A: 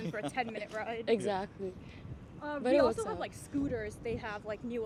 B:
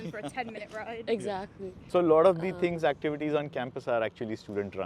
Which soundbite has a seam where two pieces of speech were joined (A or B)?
B